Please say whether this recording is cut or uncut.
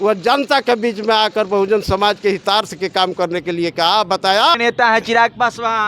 cut